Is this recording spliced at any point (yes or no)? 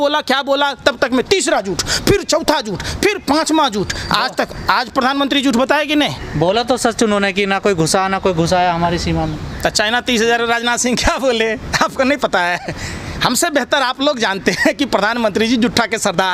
no